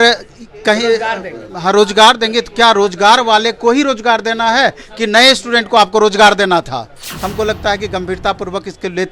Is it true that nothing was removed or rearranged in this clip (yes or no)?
no